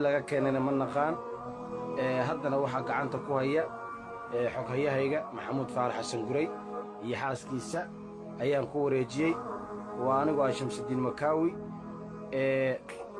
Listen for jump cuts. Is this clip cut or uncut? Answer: cut